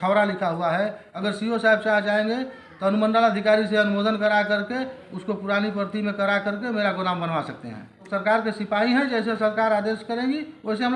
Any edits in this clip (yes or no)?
yes